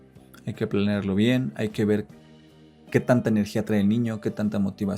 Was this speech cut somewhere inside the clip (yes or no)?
no